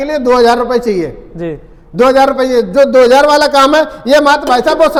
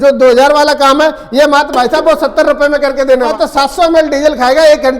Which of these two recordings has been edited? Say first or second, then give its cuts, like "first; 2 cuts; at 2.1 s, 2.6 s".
second; 1 cut; at 3.5 s